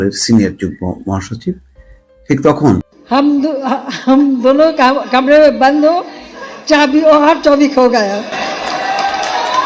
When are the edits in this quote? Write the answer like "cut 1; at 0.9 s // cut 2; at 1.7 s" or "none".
cut 1; at 2.9 s